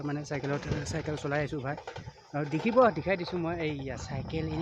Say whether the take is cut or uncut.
uncut